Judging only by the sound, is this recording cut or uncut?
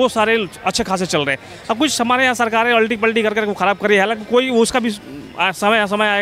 uncut